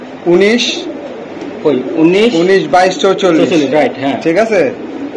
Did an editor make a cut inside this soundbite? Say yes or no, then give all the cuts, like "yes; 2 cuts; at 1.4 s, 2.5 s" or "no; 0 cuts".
no; 0 cuts